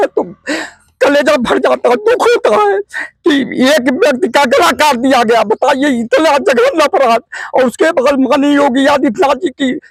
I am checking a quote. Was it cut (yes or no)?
no